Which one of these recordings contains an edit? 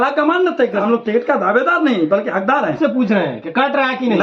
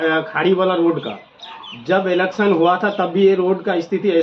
first; 2 cuts; at 0.8 s, 2.8 s

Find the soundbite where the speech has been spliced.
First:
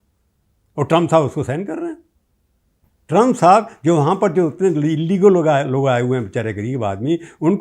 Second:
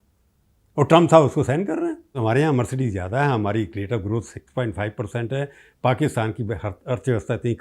second; 1 cut; at 2.2 s

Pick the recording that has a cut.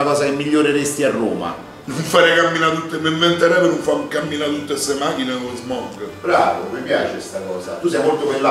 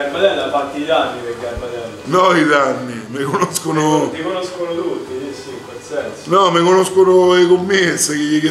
first; 1 cut; at 1.9 s

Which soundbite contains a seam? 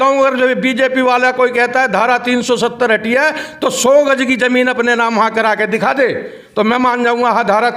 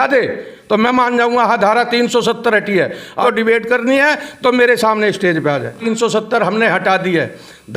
second; 2 cuts; at 3.2 s, 5.8 s

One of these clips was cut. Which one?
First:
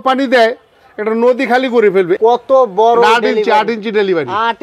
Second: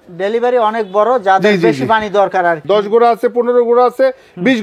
second; 1 cut; at 2.6 s

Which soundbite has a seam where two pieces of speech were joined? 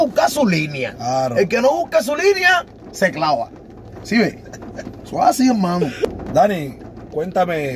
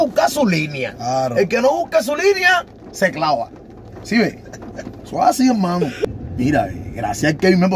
second; 1 cut; at 6.2 s

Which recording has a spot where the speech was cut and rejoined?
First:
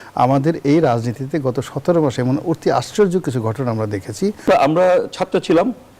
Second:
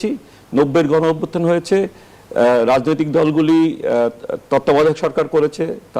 first; 1 cut; at 4.4 s

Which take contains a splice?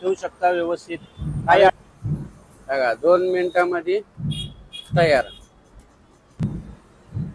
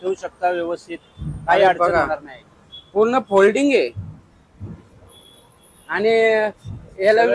first; 1 cut; at 1.8 s

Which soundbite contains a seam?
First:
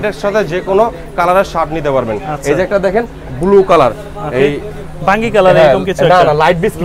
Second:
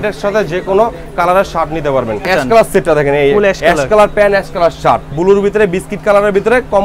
second; 2 cuts; at 2.3 s, 5.2 s

